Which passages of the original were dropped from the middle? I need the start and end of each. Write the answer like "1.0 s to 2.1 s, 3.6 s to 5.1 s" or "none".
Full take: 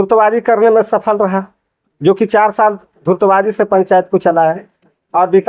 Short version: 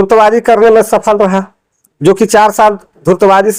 none